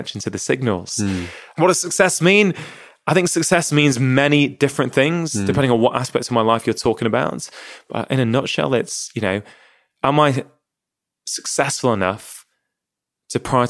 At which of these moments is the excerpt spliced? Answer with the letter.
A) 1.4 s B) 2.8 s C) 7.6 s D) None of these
A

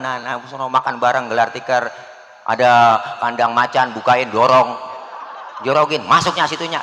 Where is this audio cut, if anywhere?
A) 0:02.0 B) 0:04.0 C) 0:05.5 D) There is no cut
D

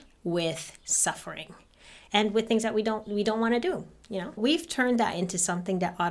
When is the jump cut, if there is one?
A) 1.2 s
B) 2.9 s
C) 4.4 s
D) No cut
C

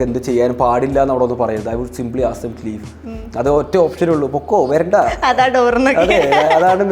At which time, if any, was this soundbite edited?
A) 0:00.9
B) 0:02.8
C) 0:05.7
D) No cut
D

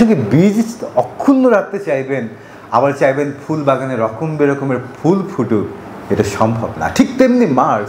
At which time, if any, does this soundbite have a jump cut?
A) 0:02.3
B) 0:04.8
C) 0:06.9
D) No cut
D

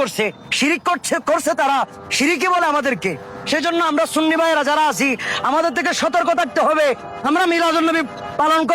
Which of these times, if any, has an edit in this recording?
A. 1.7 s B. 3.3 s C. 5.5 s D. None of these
D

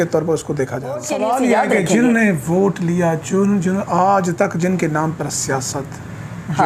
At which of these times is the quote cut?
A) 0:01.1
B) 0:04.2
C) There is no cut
A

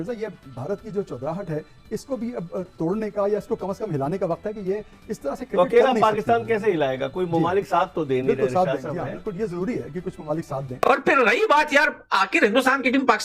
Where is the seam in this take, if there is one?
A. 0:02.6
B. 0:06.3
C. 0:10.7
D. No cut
C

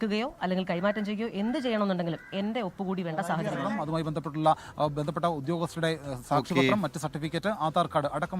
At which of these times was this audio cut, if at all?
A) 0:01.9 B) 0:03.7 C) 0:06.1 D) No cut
B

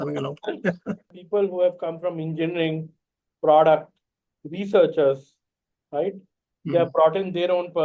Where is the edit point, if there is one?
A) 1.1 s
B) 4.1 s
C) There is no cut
A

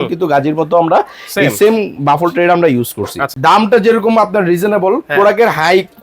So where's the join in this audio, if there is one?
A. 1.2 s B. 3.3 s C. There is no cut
B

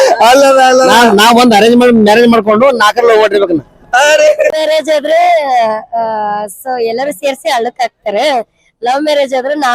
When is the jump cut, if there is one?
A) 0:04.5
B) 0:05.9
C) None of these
A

